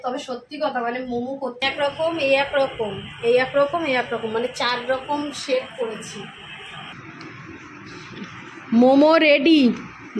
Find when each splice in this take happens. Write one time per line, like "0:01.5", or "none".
0:01.6
0:06.9

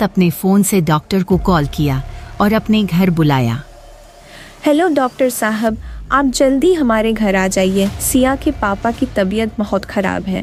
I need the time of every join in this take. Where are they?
none

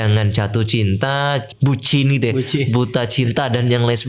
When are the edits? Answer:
0:01.5

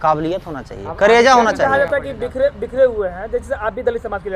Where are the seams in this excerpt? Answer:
none

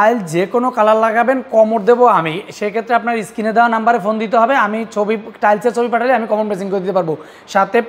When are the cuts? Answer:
none

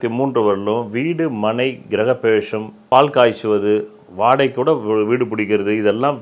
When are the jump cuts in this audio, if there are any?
none

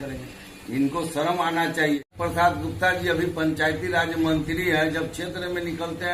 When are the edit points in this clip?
0:02.1

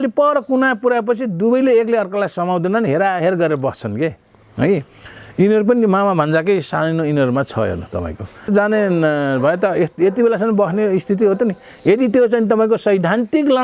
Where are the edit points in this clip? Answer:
0:08.5

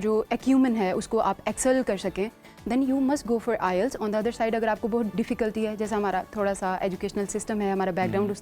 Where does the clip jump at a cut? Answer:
none

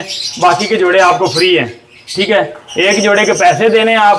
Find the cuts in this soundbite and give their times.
none

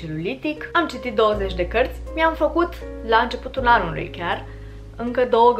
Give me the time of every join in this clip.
0:00.7
0:02.1

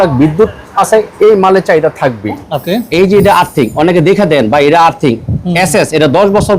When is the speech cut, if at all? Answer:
0:02.4

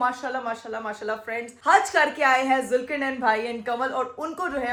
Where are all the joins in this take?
none

